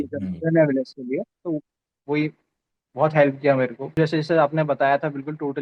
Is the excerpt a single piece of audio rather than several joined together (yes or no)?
no